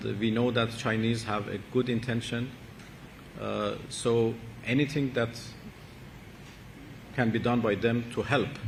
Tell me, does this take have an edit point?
no; 0 cuts

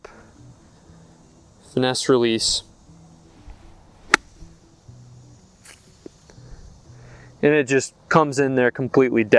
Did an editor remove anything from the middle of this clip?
no; 0 cuts

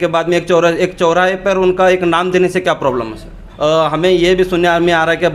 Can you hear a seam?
yes; 1 cut; at 3.4 s

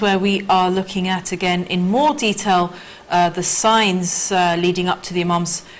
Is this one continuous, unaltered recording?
yes; 0 cuts

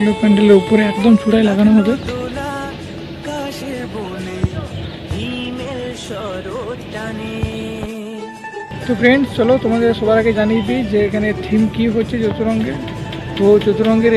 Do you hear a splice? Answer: no; 0 cuts

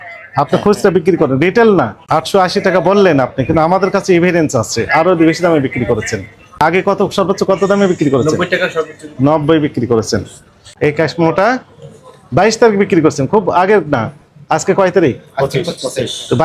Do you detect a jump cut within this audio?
yes; 3 cuts; at 2.0 s, 6.6 s, 10.6 s

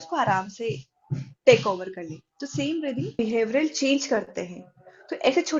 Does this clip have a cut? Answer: yes; 1 cut; at 3.2 s

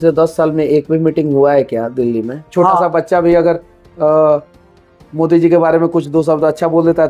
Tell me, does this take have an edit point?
yes; 1 cut; at 2.5 s

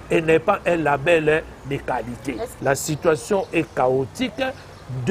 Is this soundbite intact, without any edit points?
no; 1 cut; at 2.5 s

